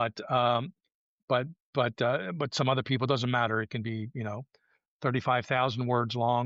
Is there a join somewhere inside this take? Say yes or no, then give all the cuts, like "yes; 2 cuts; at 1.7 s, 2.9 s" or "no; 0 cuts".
no; 0 cuts